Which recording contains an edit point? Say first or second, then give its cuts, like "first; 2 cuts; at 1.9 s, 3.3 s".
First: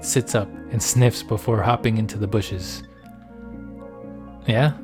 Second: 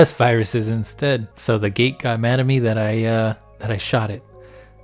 second; 1 cut; at 1.3 s